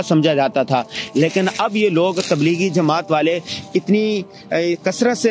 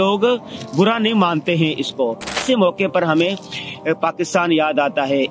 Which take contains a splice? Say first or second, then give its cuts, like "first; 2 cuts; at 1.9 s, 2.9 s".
second; 1 cut; at 2.4 s